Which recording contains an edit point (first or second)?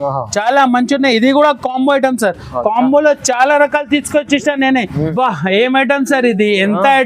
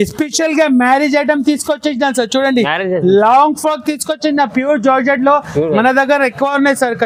first